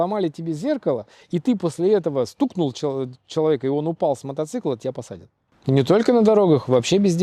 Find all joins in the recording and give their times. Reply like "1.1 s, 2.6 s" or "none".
5.5 s